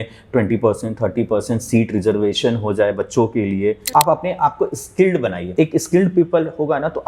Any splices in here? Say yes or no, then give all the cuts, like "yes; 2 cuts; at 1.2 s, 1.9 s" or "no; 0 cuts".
yes; 2 cuts; at 3.9 s, 5.4 s